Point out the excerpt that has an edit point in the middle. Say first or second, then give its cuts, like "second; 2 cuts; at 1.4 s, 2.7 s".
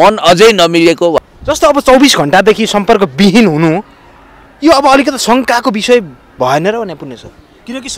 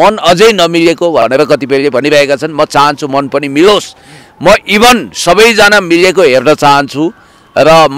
first; 1 cut; at 1.1 s